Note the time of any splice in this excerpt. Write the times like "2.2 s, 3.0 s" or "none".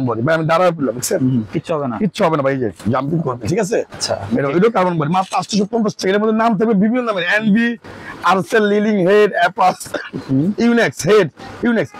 none